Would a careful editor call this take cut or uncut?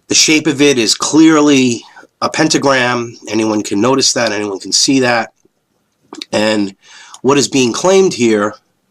cut